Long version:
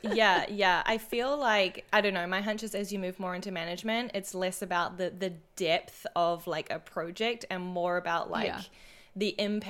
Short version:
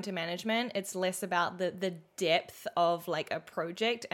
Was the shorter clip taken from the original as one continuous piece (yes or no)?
yes